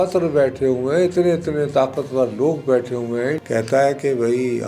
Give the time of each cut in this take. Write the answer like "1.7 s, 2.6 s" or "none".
3.4 s